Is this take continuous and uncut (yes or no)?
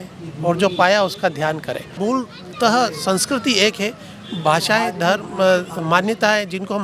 no